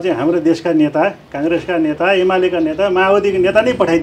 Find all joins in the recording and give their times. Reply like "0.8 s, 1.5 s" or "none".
none

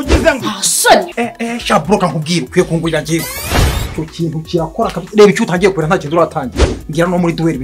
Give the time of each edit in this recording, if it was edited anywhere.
1.1 s

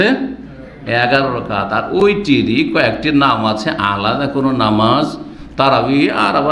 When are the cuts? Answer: none

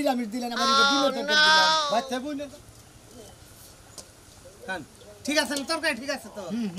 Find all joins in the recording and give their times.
2.2 s

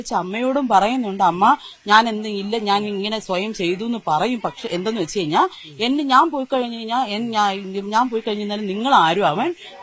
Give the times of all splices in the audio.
none

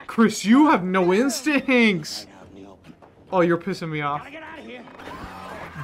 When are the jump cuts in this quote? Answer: none

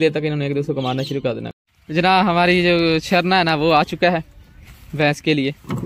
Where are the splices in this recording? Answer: 1.5 s

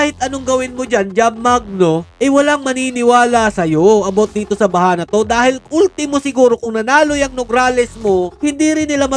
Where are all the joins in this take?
2.1 s

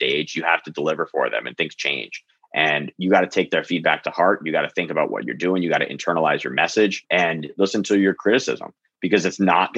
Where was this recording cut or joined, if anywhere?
7.0 s

